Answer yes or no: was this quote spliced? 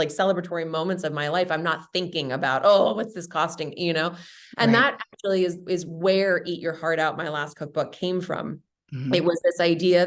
no